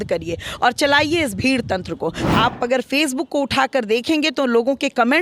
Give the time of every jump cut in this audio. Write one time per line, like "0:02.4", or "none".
0:02.2